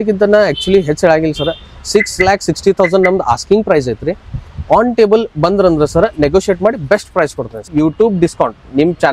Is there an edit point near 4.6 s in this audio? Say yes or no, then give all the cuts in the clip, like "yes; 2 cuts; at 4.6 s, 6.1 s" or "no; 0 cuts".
no; 1 cut; at 7.6 s